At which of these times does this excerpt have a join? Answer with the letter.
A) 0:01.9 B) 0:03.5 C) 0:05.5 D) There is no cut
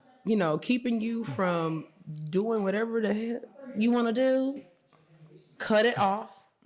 C